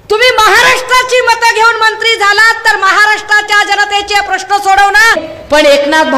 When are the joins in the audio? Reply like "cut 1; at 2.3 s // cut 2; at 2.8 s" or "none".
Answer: cut 1; at 5.3 s